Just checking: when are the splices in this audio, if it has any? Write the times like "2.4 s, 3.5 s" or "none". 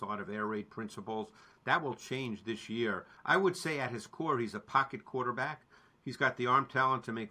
3.1 s